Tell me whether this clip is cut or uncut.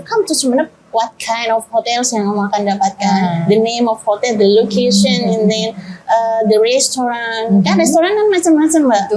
uncut